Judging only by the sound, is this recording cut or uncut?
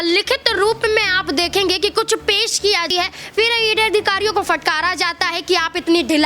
cut